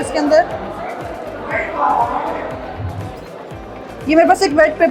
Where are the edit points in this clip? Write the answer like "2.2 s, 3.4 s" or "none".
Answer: none